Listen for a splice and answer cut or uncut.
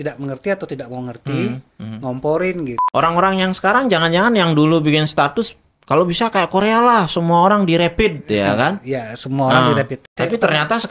cut